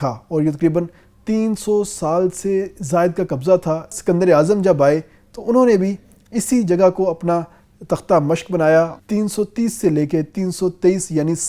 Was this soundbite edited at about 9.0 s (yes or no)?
yes